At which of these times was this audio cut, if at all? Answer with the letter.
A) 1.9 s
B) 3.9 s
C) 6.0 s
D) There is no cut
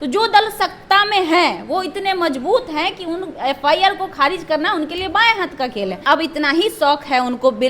C